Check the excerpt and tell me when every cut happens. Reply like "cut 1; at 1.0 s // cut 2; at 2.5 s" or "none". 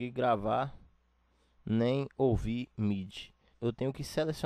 cut 1; at 3.4 s